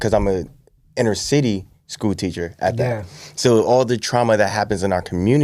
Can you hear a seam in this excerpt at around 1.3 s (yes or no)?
no